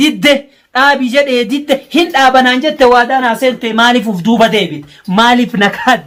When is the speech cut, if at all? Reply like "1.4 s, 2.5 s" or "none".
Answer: none